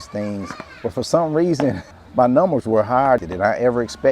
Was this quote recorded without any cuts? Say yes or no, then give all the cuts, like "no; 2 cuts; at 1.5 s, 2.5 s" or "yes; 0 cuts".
no; 2 cuts; at 1.9 s, 3.2 s